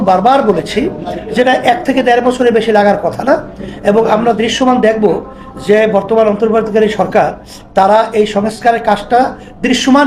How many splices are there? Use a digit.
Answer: 0